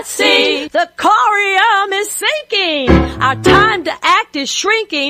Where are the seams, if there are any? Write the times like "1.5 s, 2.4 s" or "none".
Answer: none